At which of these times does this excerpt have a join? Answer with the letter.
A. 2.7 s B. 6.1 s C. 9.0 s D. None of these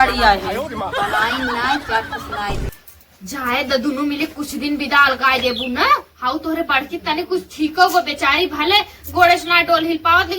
A